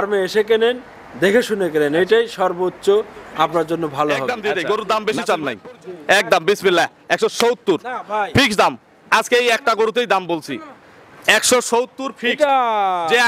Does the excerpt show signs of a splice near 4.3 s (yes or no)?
yes